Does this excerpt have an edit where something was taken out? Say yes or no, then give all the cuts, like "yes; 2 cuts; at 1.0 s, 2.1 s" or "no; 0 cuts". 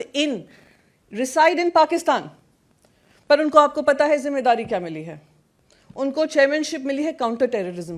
no; 0 cuts